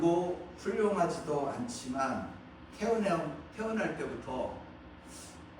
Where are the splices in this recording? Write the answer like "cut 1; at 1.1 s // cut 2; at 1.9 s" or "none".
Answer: none